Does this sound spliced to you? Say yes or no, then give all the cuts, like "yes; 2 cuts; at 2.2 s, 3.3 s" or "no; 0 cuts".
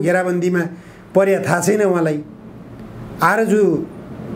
no; 0 cuts